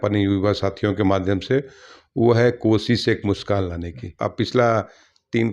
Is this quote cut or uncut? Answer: cut